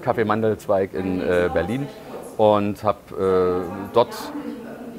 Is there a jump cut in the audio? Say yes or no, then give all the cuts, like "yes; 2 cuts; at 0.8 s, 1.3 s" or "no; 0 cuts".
no; 0 cuts